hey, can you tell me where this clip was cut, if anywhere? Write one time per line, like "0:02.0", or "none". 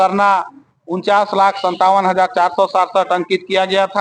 none